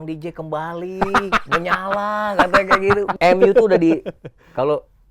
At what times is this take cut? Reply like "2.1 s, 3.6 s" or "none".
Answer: 3.2 s